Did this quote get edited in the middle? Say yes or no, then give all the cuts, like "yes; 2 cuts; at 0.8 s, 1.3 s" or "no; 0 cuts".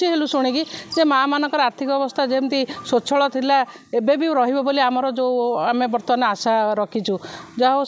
no; 0 cuts